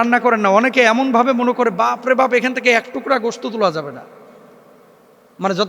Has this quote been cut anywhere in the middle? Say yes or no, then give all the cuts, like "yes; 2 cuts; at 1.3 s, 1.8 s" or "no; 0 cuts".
no; 0 cuts